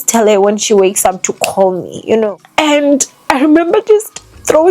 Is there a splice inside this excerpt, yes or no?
yes